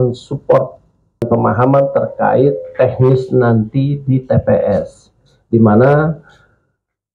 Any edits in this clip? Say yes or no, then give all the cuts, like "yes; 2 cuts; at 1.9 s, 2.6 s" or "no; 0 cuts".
yes; 1 cut; at 1.2 s